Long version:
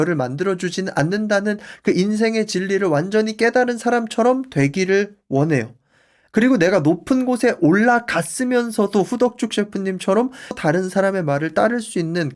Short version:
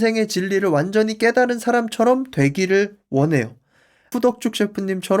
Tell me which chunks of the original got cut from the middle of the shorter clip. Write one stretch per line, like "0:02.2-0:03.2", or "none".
0:06.3-0:09.1